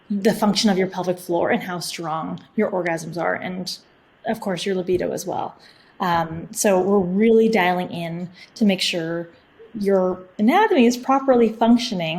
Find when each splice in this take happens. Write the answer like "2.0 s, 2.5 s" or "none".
11.0 s